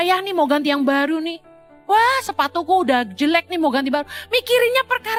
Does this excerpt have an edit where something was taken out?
no; 0 cuts

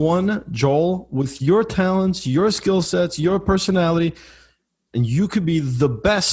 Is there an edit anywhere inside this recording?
yes; 1 cut; at 4.7 s

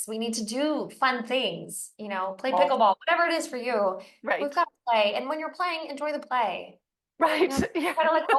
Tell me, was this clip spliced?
no; 0 cuts

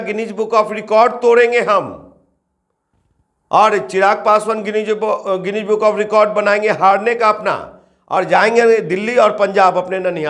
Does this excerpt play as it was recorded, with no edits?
yes; 0 cuts

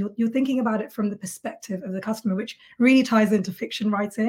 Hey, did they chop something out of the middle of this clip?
no; 0 cuts

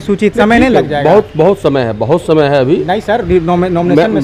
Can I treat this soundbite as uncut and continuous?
yes; 0 cuts

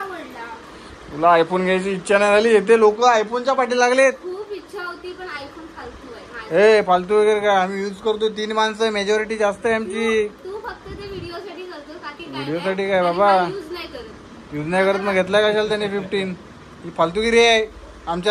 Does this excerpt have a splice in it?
no; 0 cuts

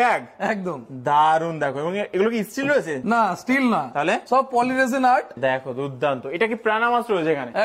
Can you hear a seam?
no; 0 cuts

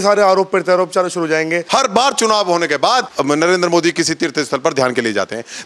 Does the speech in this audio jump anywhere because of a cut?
yes; 2 cuts; at 1.6 s, 3.1 s

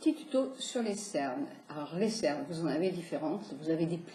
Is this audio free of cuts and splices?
yes; 0 cuts

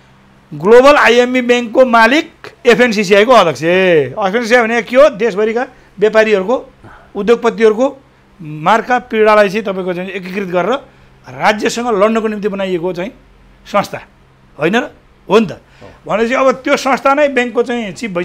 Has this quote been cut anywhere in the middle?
no; 0 cuts

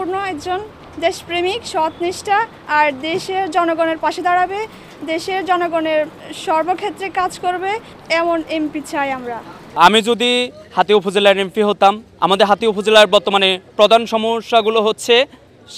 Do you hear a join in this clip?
yes; 1 cut; at 9.6 s

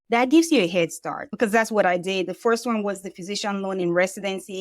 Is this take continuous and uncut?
no; 1 cut; at 1.3 s

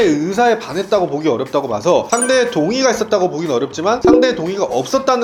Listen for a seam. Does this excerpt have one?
no; 0 cuts

